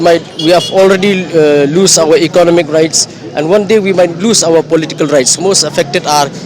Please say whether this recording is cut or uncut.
cut